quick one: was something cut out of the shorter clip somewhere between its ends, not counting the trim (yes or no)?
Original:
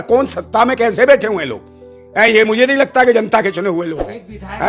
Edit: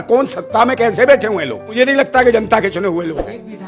yes